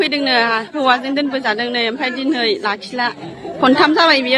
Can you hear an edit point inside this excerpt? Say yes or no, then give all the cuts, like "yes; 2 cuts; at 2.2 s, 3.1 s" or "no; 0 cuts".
no; 0 cuts